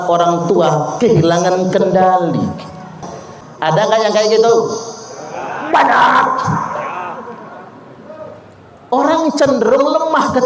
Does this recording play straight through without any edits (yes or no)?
no